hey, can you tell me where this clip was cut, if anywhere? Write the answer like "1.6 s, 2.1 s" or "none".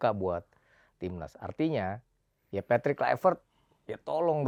none

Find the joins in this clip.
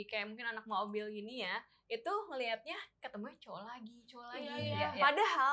none

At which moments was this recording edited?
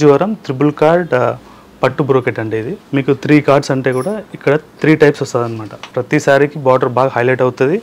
2.8 s, 5.8 s

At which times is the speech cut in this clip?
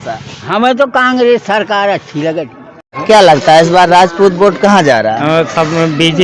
2.9 s

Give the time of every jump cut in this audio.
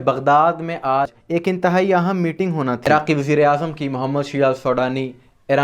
none

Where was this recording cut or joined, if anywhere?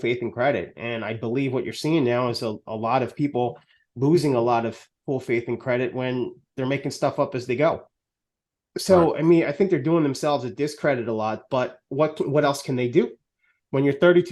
none

